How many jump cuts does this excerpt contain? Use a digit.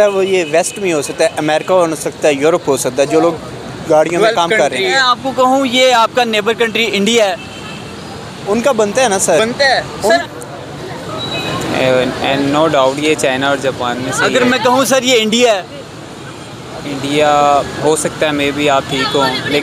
2